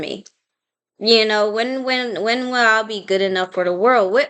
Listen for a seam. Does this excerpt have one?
no; 0 cuts

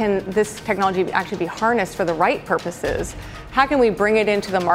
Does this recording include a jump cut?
no; 0 cuts

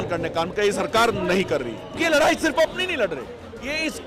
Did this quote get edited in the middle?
yes; 1 cut; at 1.9 s

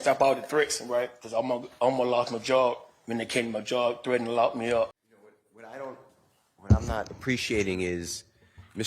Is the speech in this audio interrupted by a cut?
yes; 1 cut; at 5.1 s

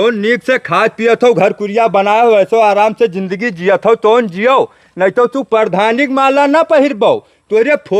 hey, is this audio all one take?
yes; 0 cuts

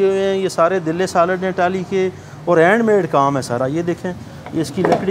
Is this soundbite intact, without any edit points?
yes; 0 cuts

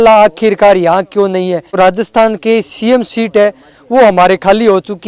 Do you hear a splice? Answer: yes; 1 cut; at 1.8 s

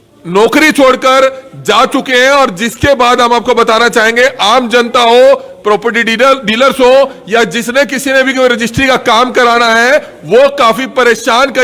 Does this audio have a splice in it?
no; 0 cuts

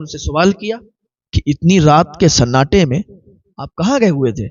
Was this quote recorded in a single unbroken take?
yes; 0 cuts

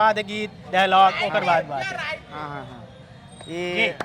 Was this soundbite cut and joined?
no; 0 cuts

